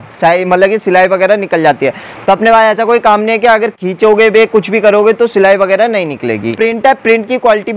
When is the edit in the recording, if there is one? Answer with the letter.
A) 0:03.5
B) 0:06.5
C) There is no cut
B